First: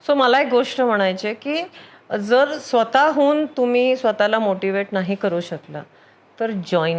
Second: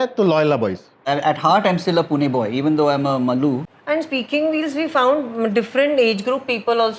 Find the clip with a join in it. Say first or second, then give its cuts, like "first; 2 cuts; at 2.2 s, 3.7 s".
second; 2 cuts; at 1.0 s, 3.7 s